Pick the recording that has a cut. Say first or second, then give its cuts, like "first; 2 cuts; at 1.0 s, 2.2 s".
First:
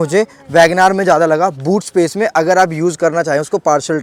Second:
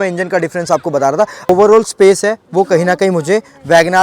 second; 1 cut; at 1.5 s